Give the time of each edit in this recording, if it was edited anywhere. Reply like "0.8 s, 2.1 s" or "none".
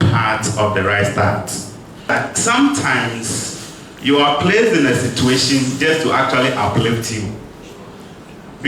2.1 s

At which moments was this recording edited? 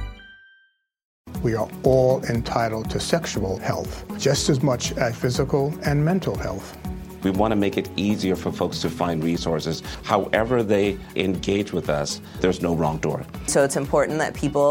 1.3 s

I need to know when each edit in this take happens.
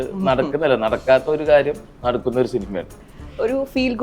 3.0 s

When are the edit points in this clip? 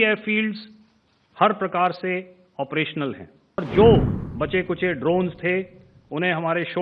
3.6 s

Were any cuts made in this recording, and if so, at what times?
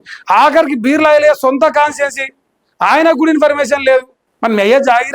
4.2 s

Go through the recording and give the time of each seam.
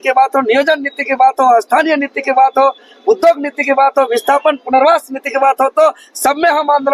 none

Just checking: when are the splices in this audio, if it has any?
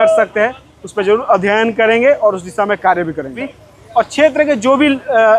3.5 s

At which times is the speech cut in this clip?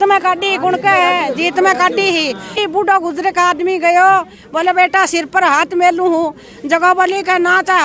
2.5 s

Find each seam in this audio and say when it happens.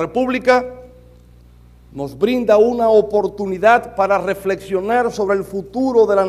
none

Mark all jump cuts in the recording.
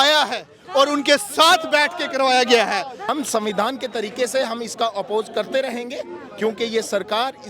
3.1 s

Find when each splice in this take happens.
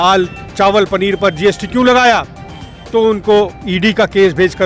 none

